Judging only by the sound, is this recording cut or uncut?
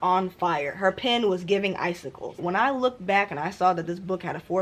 cut